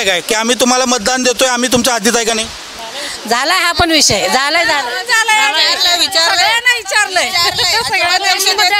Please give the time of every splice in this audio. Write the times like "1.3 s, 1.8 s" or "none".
none